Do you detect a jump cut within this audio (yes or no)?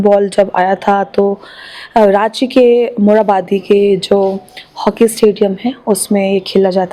no